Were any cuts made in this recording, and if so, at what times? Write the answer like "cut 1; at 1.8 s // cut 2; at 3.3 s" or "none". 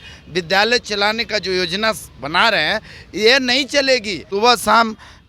cut 1; at 4.2 s